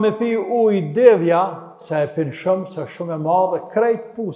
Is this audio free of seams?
yes; 0 cuts

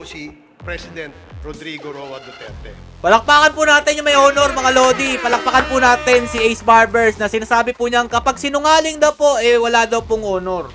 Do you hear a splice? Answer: no; 0 cuts

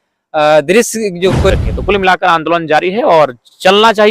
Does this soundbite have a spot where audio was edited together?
yes; 1 cut; at 1.5 s

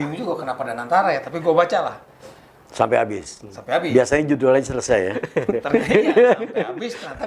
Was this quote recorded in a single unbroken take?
yes; 0 cuts

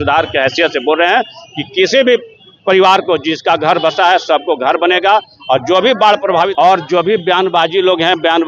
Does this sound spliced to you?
yes; 1 cut; at 6.5 s

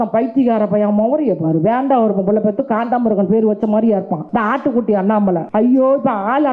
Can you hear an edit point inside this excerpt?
yes; 2 cuts; at 4.2 s, 5.5 s

